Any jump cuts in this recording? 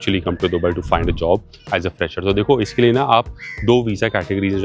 no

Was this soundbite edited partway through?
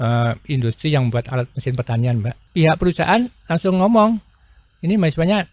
yes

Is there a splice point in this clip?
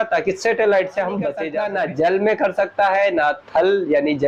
yes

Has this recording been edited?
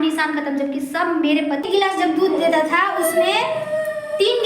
yes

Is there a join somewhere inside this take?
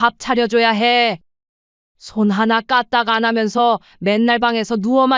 yes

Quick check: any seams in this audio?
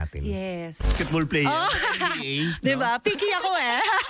yes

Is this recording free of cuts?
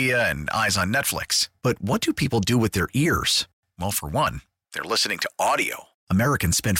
yes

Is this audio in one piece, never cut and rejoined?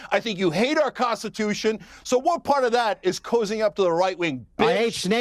yes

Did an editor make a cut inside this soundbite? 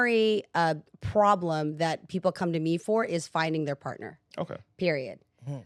no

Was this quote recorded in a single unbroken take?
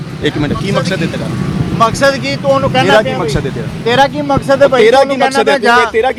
yes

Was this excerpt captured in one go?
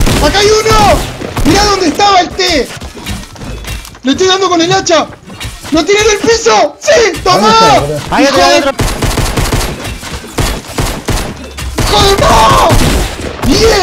no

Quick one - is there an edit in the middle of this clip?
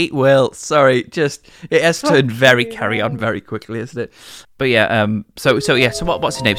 no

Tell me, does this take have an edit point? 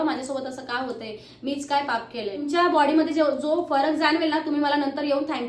yes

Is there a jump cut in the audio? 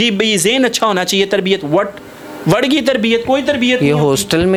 no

